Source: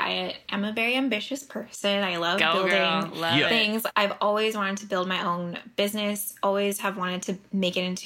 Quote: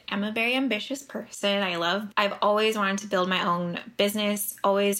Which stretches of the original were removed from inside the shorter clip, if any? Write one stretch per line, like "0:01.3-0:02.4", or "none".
0:02.5-0:03.8